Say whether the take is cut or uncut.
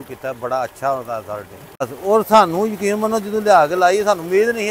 cut